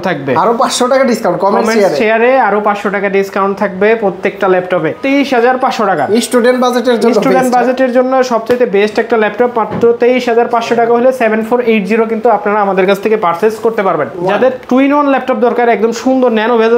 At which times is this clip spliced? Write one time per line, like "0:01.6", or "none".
0:05.0
0:14.2